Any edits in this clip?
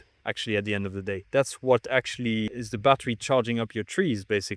yes; 2 cuts; at 1.1 s, 2.6 s

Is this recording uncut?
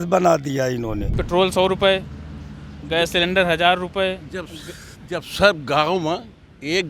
no; 1 cut; at 1.1 s

